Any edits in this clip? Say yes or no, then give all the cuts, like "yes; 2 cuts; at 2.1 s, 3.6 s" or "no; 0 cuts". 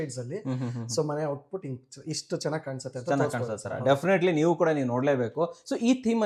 no; 0 cuts